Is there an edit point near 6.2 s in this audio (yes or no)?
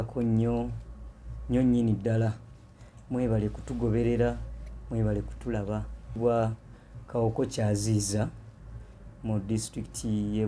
yes